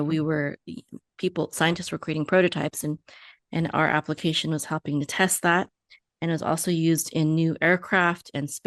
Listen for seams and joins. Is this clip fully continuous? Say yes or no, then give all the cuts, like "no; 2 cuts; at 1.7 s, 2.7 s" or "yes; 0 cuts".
yes; 0 cuts